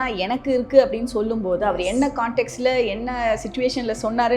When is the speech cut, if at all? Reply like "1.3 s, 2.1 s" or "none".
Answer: none